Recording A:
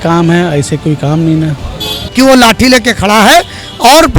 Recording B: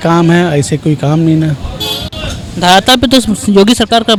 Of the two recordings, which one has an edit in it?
A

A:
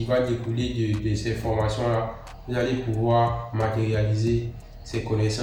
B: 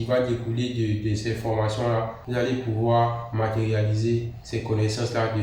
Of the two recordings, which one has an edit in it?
B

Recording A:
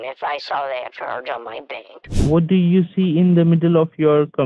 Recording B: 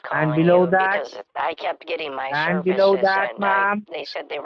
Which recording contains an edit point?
A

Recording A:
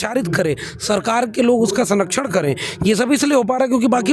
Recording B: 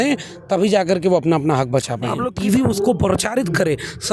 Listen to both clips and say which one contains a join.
B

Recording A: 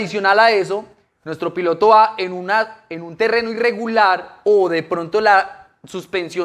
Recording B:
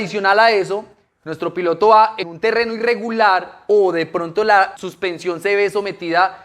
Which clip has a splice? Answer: B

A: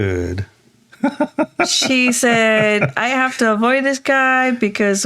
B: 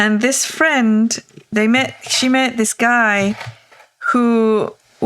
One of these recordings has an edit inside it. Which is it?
B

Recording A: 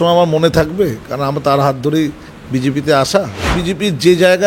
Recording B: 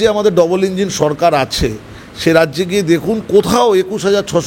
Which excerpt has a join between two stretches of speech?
A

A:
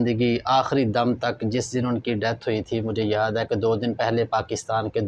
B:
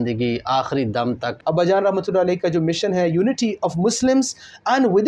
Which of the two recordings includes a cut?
B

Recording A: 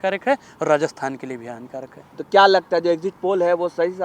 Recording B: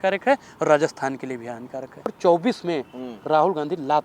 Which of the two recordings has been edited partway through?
B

